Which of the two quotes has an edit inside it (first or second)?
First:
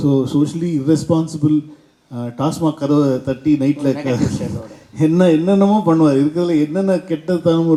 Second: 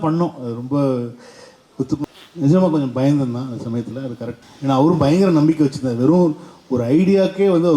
second